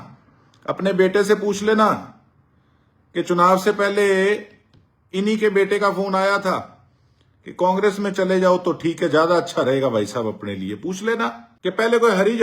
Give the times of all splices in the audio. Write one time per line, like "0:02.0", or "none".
0:11.4